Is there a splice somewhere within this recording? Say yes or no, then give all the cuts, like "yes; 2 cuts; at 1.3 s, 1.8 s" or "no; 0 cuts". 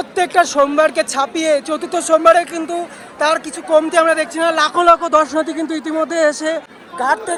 no; 0 cuts